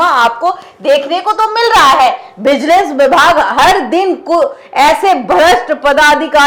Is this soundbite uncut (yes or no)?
yes